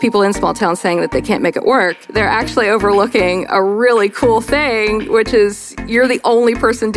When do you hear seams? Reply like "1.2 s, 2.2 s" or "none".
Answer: 2.0 s